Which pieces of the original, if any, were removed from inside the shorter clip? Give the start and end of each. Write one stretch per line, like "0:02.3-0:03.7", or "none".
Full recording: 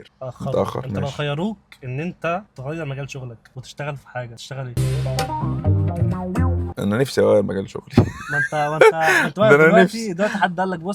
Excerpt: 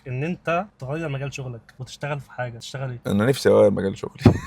0:04.7-0:06.7